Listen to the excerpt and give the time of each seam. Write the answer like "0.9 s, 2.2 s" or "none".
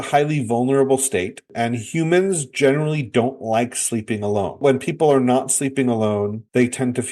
4.6 s